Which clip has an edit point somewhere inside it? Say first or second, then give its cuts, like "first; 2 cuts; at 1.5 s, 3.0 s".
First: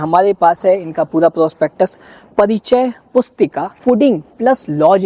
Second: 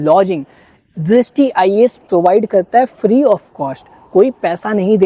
first; 1 cut; at 3.8 s